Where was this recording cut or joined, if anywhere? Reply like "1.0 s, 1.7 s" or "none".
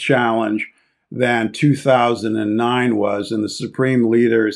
none